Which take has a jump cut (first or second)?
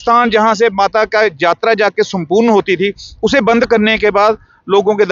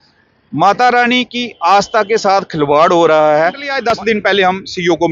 second